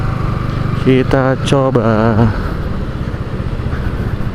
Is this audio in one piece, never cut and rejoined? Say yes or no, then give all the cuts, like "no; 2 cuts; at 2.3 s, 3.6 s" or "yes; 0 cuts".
yes; 0 cuts